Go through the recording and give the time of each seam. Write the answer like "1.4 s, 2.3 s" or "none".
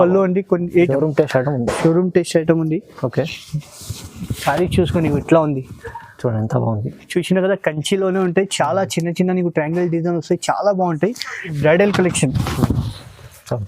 0.9 s, 11.6 s